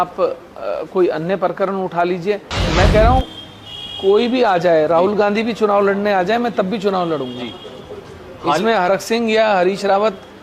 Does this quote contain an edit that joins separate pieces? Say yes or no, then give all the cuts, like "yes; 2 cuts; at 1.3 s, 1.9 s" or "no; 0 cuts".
yes; 1 cut; at 2.5 s